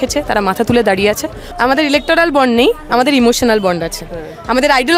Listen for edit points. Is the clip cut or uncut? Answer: cut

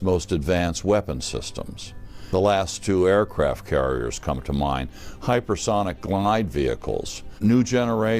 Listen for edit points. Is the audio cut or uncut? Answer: cut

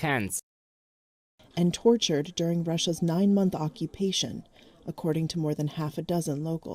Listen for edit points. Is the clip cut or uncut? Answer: cut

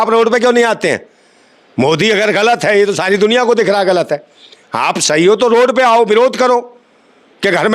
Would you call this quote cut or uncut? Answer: uncut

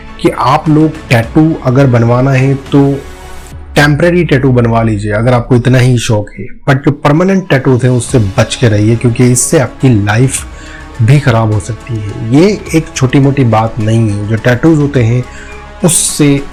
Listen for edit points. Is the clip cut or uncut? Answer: uncut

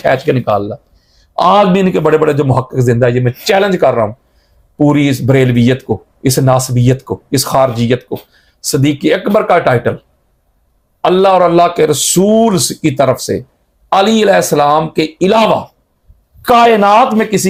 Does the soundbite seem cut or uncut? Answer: uncut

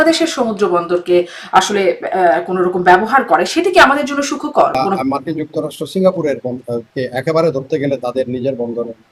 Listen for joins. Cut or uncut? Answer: cut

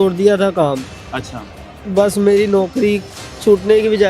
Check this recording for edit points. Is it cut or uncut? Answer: uncut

